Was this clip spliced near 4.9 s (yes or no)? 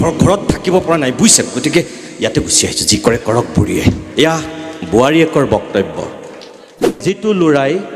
no